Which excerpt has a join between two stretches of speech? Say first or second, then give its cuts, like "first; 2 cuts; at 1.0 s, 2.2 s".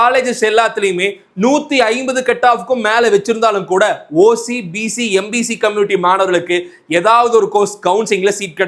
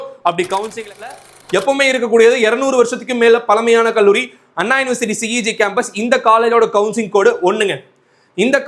second; 1 cut; at 1.1 s